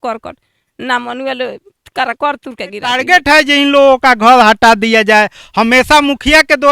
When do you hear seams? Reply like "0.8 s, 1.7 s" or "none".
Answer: 3.0 s